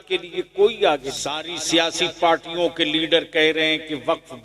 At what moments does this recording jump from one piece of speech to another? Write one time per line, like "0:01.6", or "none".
0:01.5